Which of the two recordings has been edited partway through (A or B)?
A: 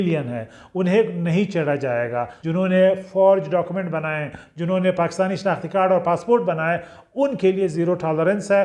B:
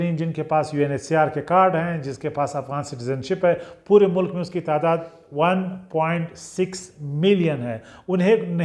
A